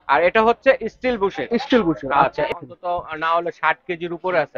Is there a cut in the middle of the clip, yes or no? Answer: yes